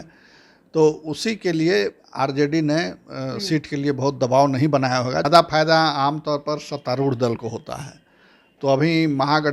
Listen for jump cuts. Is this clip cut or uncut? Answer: cut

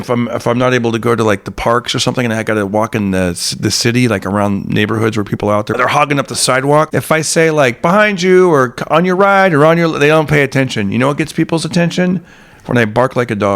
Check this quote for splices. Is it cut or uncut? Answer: cut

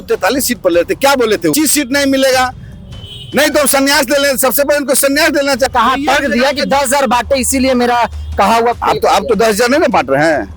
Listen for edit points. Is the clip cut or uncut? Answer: cut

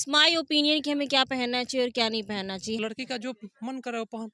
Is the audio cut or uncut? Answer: cut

